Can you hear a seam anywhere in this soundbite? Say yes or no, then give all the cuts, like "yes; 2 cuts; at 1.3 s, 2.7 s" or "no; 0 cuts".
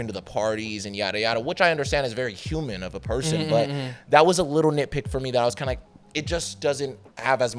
no; 0 cuts